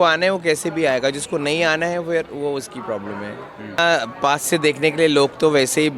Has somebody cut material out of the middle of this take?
yes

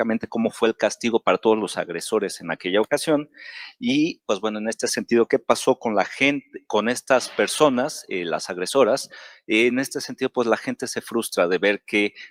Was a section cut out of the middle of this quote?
no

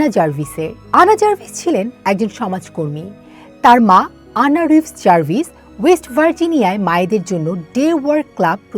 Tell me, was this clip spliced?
no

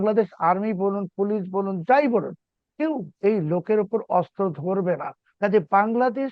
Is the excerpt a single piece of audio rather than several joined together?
no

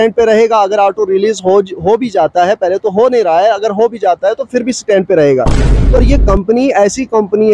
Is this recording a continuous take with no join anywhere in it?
no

